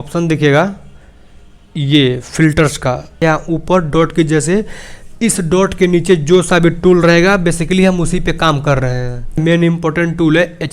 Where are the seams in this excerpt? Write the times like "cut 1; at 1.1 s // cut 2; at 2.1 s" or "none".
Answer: cut 1; at 3.2 s // cut 2; at 9.4 s

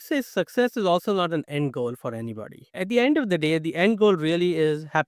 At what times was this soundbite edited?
none

